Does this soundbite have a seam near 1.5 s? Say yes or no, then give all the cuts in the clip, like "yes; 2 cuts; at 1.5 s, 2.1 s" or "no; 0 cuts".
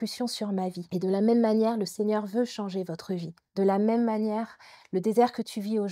no; 1 cut; at 3.4 s